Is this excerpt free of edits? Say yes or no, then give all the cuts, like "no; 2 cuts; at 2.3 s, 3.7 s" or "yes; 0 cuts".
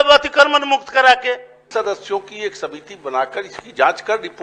no; 1 cut; at 1.6 s